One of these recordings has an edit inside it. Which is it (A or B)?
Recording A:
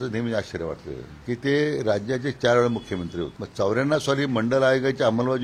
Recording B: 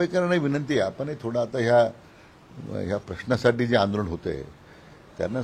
A